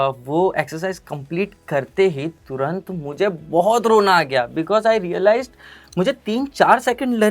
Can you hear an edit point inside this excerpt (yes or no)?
no